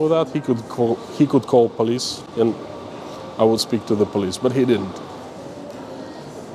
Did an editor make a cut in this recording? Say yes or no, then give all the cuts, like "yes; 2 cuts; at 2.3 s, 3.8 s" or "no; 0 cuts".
no; 0 cuts